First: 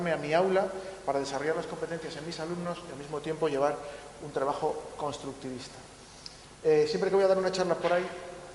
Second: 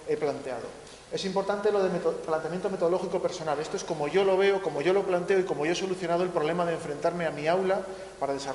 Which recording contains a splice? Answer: first; 1 cut; at 3.8 s

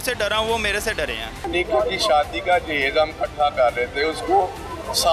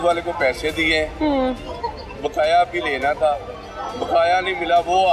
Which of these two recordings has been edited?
first; 1 cut; at 1.5 s

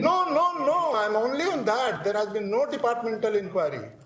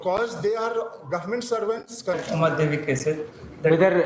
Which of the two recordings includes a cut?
second; 1 cut; at 2.2 s

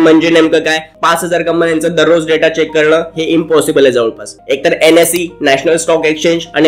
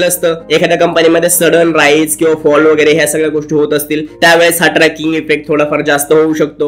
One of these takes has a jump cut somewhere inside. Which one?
first; 2 cuts; at 0.9 s, 4.4 s

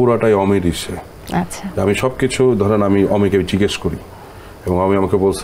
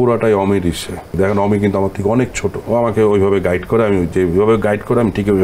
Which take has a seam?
second; 2 cuts; at 1.1 s, 2.5 s

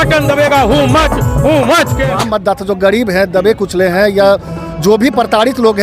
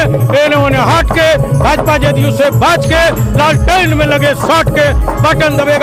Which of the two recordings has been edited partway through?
first; 1 cut; at 2.0 s

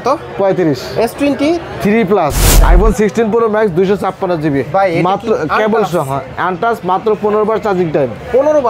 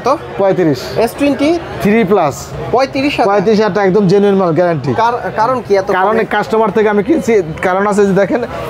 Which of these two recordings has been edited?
first; 1 cut; at 2.5 s

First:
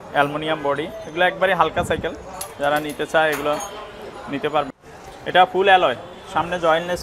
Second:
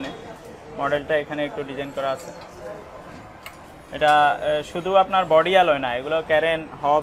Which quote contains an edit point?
first; 1 cut; at 4.8 s

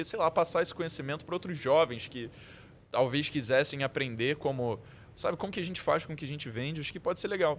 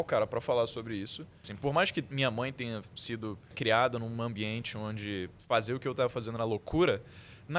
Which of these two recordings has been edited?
second; 2 cuts; at 1.5 s, 3.5 s

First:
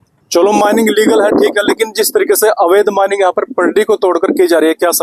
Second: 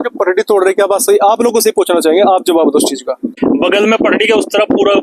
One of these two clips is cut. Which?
second; 1 cut; at 3.3 s

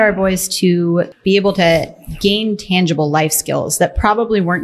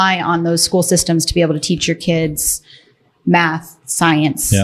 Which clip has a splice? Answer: first; 1 cut; at 1.1 s

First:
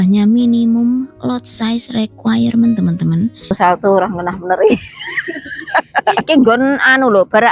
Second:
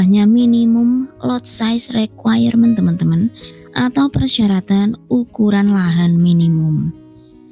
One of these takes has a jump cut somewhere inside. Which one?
first; 2 cuts; at 3.6 s, 6.2 s

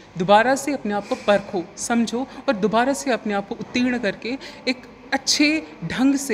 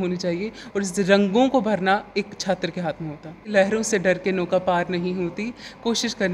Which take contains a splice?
second; 1 cut; at 3.5 s

